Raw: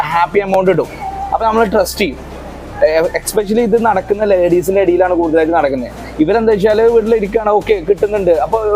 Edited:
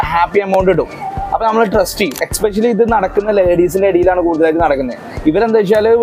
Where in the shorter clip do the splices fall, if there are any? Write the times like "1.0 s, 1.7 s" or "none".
2.3 s